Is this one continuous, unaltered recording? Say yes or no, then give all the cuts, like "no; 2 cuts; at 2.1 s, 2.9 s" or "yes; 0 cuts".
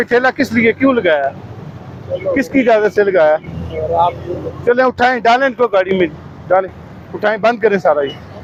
yes; 0 cuts